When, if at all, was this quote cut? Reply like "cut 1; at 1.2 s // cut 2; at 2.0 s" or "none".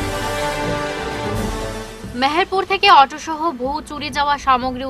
cut 1; at 1.5 s